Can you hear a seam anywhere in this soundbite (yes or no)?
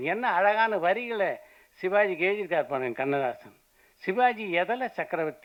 no